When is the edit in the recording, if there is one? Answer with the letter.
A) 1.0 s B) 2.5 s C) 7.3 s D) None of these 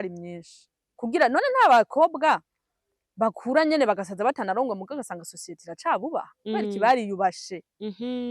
A